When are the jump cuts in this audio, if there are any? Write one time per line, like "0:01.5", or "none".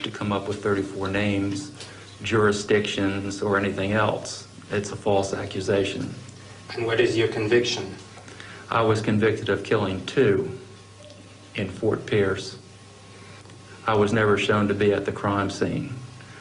0:14.3